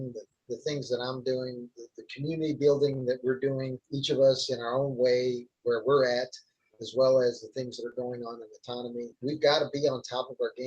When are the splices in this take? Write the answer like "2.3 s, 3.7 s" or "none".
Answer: 3.9 s, 5.5 s, 9.2 s